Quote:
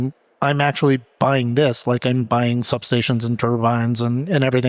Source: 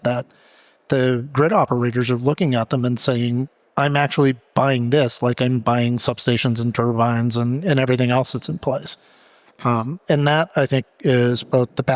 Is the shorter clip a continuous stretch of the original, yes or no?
yes